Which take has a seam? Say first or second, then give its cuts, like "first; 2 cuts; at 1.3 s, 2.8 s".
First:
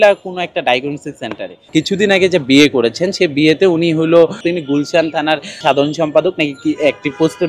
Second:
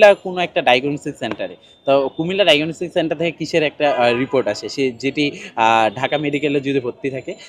first; 3 cuts; at 1.7 s, 4.4 s, 5.6 s